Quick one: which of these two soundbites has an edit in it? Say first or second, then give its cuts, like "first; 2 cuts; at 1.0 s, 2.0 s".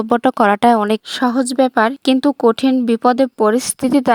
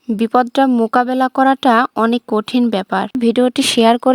second; 1 cut; at 3.1 s